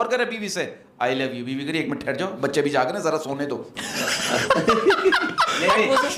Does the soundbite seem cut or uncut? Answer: uncut